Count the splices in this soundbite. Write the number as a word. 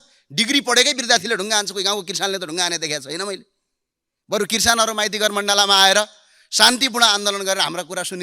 zero